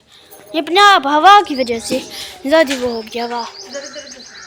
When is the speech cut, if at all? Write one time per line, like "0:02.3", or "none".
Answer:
none